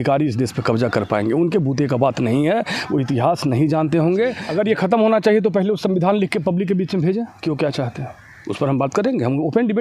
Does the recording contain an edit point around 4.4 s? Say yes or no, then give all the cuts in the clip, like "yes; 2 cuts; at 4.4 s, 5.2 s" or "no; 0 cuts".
yes; 1 cut; at 4.4 s